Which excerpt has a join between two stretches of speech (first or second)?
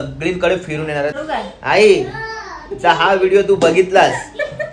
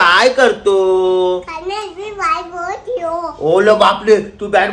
first